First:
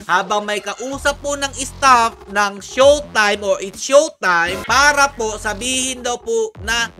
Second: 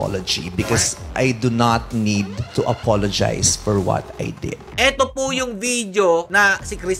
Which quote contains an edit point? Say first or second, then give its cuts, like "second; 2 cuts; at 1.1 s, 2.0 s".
second; 3 cuts; at 1.0 s, 2.4 s, 4.7 s